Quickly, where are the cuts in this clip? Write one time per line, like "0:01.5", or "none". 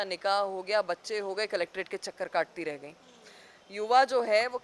none